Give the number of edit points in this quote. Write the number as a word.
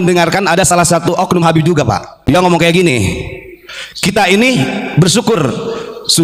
one